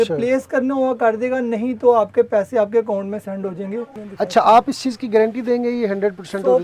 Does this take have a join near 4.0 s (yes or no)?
yes